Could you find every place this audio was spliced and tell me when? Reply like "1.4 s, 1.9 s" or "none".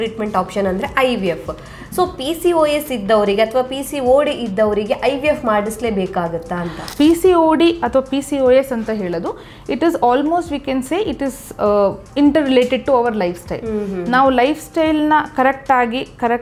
6.8 s